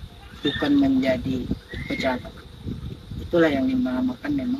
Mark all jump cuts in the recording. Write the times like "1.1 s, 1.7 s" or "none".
none